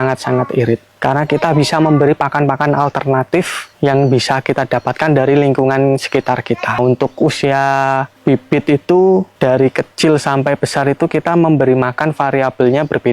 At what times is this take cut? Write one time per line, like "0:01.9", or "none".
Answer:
0:06.8